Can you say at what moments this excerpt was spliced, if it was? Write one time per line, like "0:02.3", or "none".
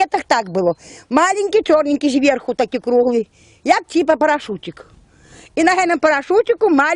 0:03.2